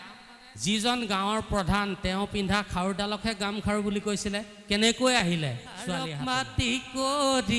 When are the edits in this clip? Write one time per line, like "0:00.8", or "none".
0:06.1